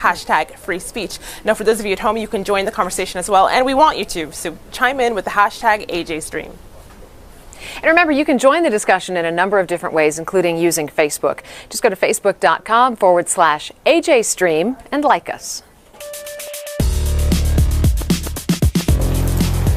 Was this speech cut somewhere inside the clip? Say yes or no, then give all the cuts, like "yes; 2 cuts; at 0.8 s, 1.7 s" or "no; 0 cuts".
yes; 1 cut; at 1.8 s